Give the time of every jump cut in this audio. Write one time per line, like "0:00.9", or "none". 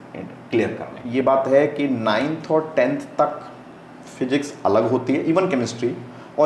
0:01.0